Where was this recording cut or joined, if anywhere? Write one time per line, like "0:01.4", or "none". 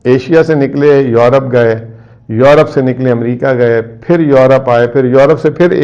none

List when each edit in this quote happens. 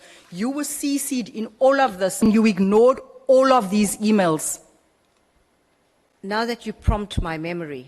0:02.3
0:06.1

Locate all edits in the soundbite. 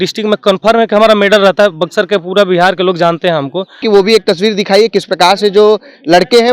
0:03.8

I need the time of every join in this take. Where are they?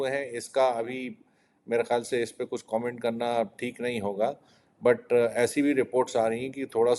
none

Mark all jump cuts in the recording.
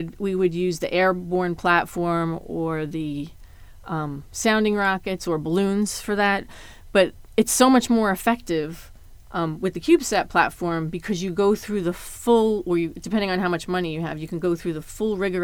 none

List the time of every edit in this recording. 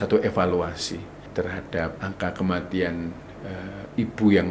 0:01.2
0:02.0

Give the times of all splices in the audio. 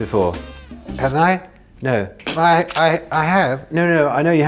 none

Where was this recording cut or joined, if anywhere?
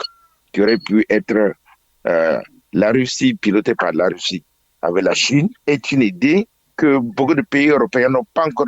0:05.6
0:06.6

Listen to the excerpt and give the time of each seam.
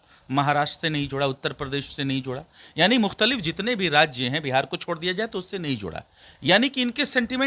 none

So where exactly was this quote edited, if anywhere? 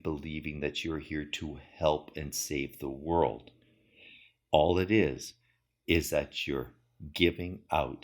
0:04.3

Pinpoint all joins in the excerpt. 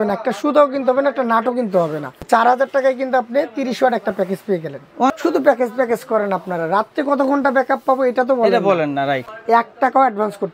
0:02.1
0:05.1
0:09.3

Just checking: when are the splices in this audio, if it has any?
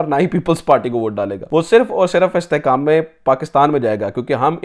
0:01.4

